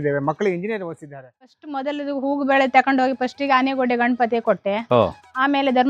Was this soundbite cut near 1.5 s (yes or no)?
yes